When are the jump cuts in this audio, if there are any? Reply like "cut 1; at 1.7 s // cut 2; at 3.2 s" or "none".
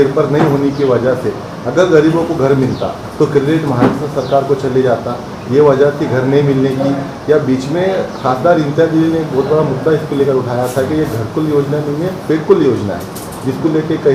none